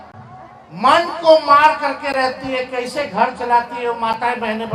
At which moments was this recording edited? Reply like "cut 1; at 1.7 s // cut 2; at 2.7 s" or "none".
none